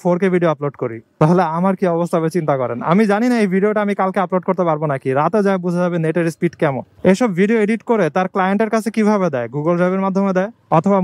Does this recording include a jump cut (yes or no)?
yes